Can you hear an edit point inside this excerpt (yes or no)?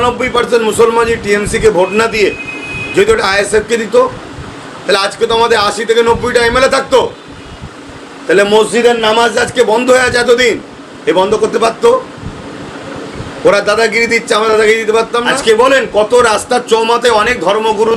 yes